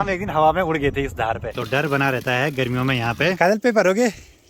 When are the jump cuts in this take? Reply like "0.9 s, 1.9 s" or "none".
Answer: 1.6 s, 3.4 s